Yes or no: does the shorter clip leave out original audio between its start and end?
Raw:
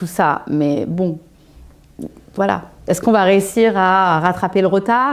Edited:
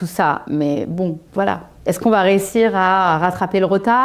yes